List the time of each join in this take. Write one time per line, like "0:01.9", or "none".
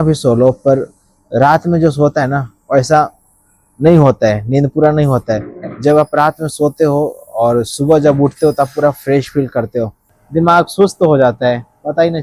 0:10.2

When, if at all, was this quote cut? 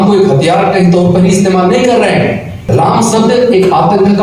0:02.5

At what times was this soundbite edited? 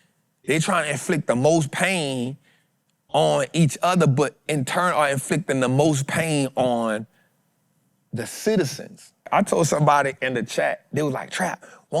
0:09.3

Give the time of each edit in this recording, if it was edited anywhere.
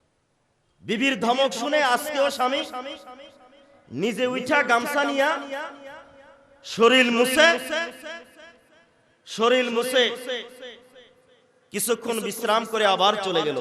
none

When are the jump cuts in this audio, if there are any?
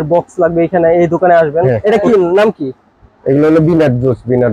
0:01.7

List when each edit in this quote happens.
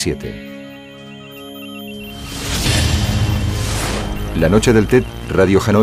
0:04.5

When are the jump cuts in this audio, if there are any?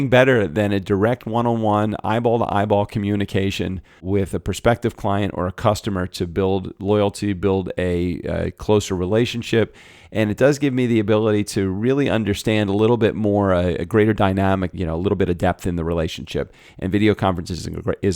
0:04.0
0:14.7

